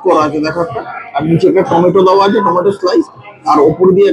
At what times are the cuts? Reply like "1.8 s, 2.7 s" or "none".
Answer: none